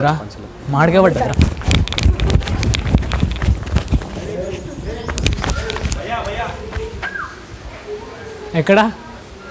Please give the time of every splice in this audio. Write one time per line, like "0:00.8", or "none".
none